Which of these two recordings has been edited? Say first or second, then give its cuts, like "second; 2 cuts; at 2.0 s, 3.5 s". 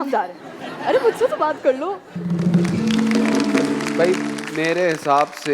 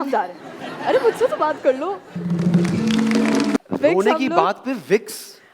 second; 1 cut; at 3.6 s